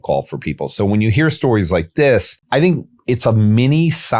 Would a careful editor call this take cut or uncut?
cut